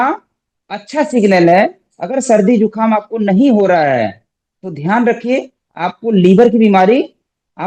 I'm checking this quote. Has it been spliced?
no; 0 cuts

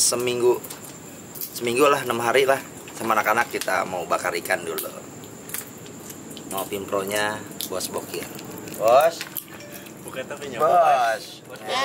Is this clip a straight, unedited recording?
yes; 0 cuts

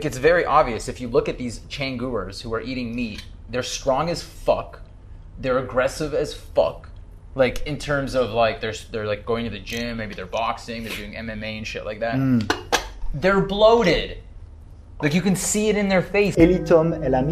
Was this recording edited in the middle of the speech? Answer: yes; 1 cut; at 16.4 s

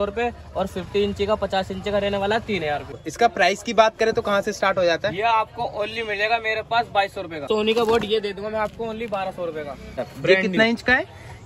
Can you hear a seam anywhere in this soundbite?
yes; 3 cuts; at 2.9 s, 7.5 s, 10.0 s

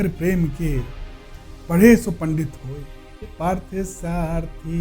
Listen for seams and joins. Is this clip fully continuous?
no; 1 cut; at 3.3 s

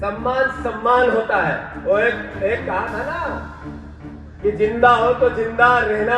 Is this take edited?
no; 0 cuts

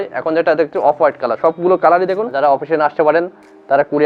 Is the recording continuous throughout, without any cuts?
no; 1 cut; at 2.3 s

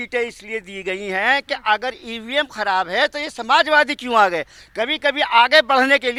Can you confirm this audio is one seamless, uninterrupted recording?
yes; 0 cuts

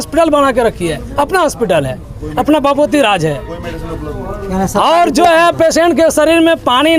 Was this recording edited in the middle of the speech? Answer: no; 0 cuts

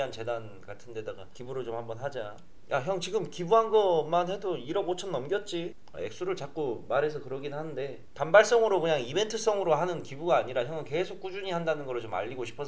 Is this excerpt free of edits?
no; 1 cut; at 5.8 s

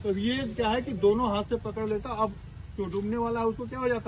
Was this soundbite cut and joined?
no; 0 cuts

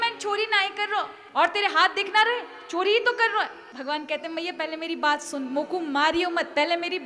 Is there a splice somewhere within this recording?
yes; 2 cuts; at 1.2 s, 3.7 s

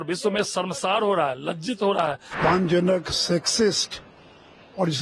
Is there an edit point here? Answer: yes; 1 cut; at 2.3 s

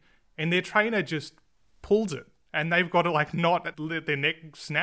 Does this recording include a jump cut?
yes; 1 cut; at 3.7 s

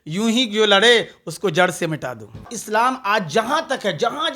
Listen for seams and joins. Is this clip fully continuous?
no; 1 cut; at 2.4 s

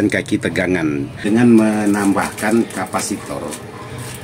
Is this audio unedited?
no; 1 cut; at 1.2 s

